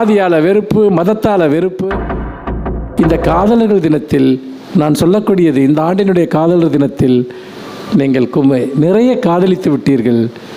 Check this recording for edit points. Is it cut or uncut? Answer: cut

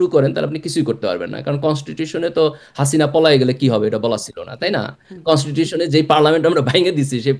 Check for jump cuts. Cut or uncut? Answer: uncut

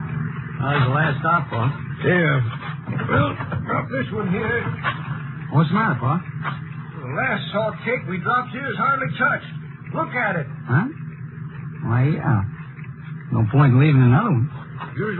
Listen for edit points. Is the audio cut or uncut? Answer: cut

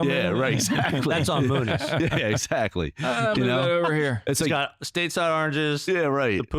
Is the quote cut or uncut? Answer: uncut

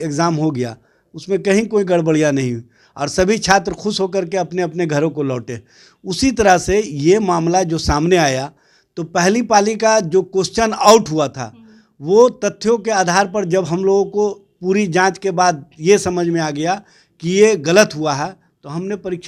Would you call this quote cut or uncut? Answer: uncut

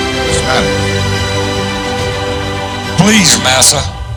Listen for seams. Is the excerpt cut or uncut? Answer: uncut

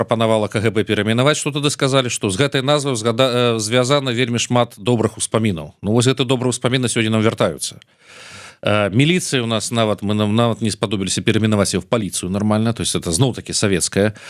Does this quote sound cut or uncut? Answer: uncut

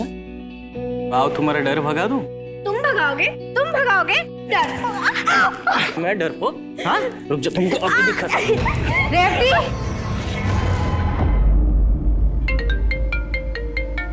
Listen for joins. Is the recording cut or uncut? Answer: cut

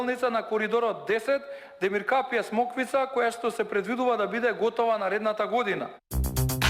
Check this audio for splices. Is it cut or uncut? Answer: cut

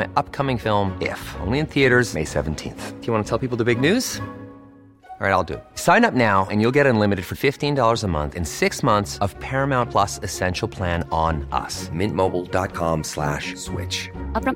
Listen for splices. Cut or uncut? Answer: uncut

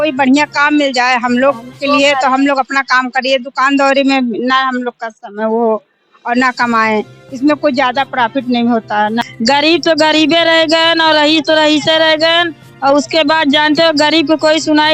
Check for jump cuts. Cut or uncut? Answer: cut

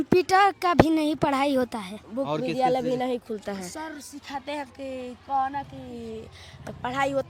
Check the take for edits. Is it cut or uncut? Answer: uncut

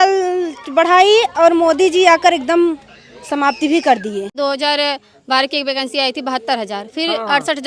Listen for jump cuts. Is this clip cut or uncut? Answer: cut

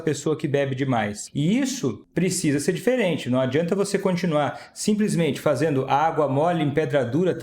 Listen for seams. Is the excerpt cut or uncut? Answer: cut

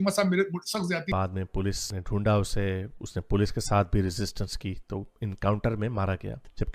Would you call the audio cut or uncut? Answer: cut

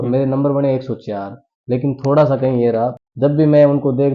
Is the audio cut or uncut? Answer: cut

